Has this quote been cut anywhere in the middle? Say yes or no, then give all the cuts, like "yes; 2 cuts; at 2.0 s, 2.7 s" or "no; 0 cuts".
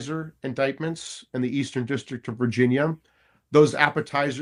no; 0 cuts